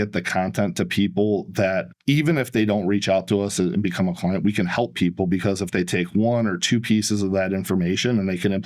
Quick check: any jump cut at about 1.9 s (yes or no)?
yes